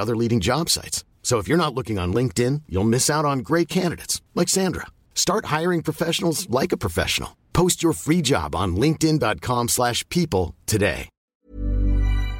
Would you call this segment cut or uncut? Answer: cut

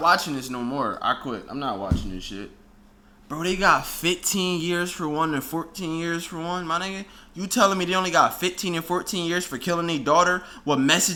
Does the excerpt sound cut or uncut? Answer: uncut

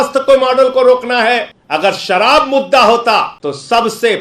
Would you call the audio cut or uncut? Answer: cut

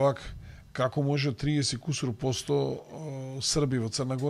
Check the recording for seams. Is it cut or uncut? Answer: uncut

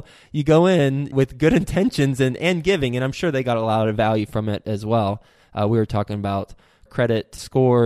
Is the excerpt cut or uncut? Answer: cut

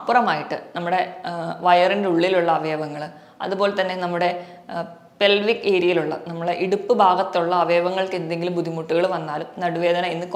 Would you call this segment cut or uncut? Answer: uncut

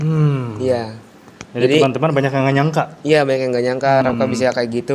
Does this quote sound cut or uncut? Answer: uncut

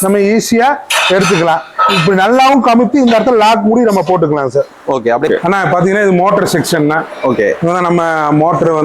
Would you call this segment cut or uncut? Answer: cut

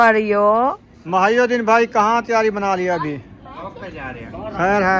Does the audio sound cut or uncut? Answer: cut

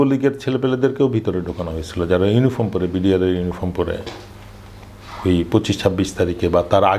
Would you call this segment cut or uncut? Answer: uncut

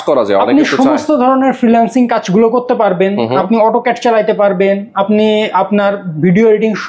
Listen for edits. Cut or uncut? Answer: uncut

